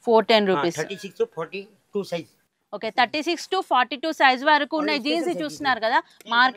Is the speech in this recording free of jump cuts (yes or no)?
yes